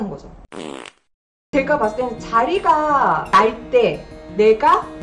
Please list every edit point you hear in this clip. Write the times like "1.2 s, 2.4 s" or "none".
1.3 s

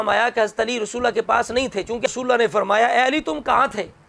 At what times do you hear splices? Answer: 2.1 s

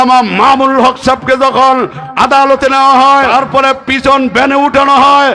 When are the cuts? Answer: 3.3 s

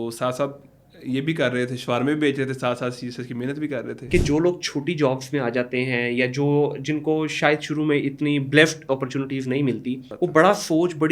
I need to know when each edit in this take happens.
4.0 s, 10.1 s

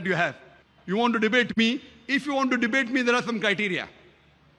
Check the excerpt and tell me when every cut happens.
none

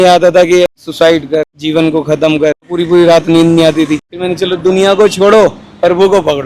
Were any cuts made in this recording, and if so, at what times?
0.8 s, 1.6 s, 2.7 s, 4.2 s

